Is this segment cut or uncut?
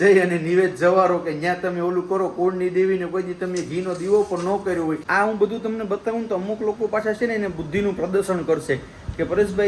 cut